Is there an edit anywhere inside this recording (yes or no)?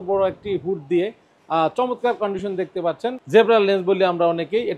no